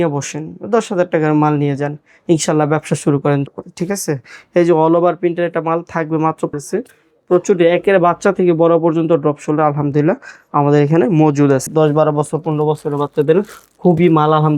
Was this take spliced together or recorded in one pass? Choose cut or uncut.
cut